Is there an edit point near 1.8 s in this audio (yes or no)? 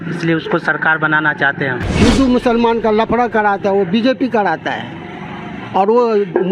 yes